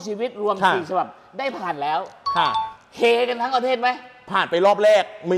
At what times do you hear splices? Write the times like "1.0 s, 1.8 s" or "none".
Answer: none

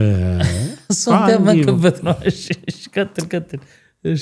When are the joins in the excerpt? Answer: none

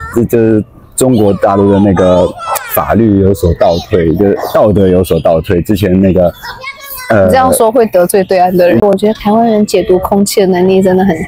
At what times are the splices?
8.8 s

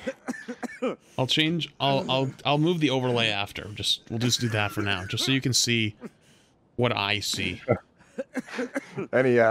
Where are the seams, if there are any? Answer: 1.0 s

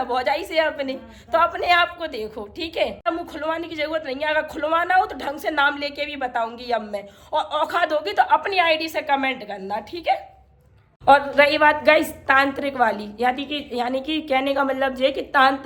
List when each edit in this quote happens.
none

